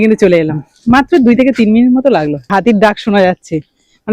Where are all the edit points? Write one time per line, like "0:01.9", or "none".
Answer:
0:02.5